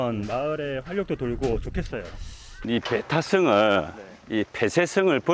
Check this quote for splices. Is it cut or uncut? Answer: uncut